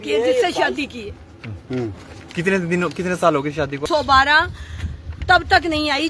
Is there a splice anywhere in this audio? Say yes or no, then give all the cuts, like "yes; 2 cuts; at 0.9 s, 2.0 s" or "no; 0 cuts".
yes; 1 cut; at 3.8 s